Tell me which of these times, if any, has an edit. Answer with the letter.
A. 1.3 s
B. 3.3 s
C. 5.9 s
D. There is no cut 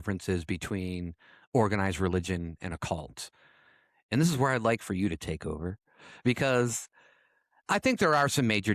D